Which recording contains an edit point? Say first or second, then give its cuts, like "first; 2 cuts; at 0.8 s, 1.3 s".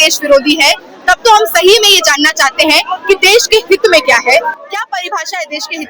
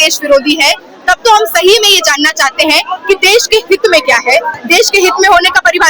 second; 1 cut; at 4.6 s